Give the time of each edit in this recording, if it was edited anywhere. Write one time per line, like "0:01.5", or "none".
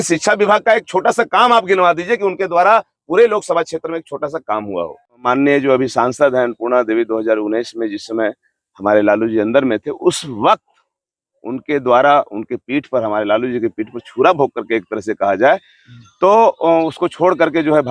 0:05.1